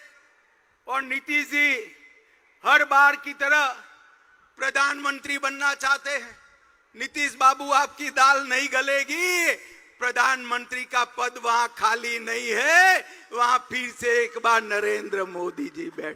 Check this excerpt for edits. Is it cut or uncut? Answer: uncut